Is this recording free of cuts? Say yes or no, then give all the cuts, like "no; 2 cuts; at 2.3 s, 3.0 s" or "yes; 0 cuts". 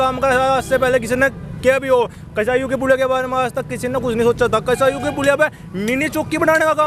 yes; 0 cuts